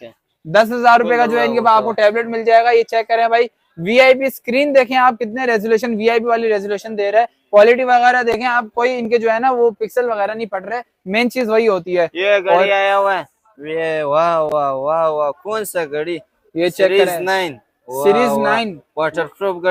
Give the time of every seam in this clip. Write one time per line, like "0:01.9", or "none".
none